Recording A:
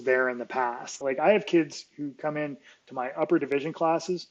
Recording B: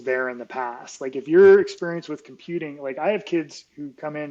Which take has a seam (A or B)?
A